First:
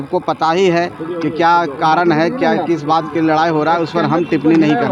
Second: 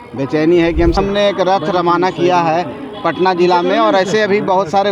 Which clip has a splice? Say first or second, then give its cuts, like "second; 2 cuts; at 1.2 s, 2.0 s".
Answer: second; 1 cut; at 1.0 s